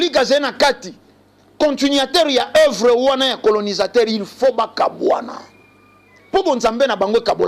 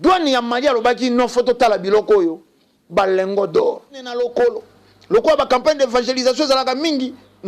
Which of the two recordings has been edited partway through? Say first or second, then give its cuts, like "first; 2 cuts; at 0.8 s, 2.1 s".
second; 1 cut; at 4.1 s